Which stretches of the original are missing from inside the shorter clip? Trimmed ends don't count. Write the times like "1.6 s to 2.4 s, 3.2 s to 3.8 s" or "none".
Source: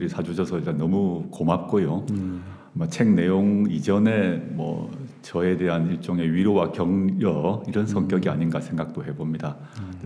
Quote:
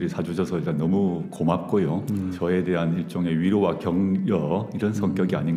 2.3 s to 5.3 s

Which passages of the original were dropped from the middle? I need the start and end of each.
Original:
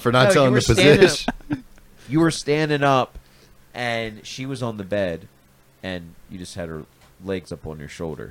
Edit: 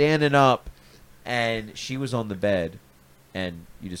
none

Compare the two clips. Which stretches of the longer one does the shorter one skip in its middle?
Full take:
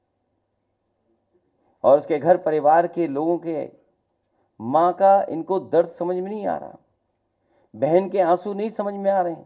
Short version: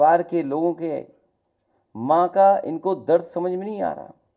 none

